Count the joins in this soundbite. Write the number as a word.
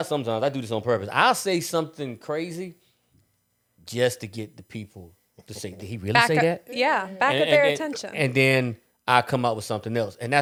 zero